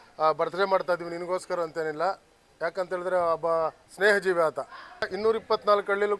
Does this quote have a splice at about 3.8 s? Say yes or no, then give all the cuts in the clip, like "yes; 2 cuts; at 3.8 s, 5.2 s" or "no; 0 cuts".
no; 1 cut; at 5.1 s